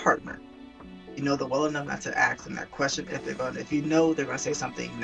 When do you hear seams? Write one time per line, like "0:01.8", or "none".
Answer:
none